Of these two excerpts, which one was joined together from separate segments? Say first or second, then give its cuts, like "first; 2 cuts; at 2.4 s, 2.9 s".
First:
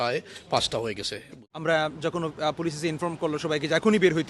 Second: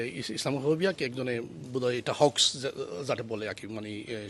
first; 1 cut; at 1.4 s